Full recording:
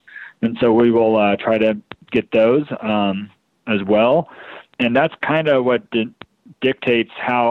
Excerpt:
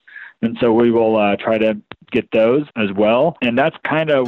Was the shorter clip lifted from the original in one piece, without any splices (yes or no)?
no